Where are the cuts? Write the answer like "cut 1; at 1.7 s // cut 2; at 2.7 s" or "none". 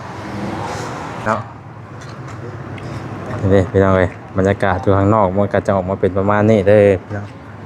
cut 1; at 1.2 s